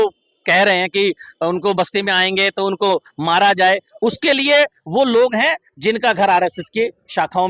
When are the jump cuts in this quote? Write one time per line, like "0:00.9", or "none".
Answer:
none